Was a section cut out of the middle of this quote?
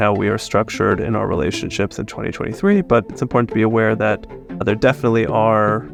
no; 0 cuts

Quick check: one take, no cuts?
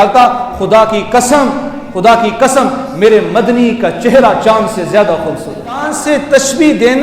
no; 1 cut; at 5.8 s

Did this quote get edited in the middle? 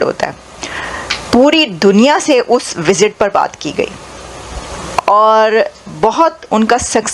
no; 0 cuts

